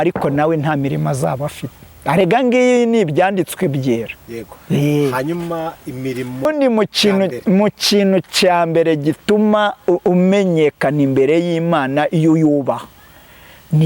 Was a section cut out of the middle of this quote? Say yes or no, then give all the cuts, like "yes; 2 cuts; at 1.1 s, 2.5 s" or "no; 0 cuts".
yes; 1 cut; at 6.5 s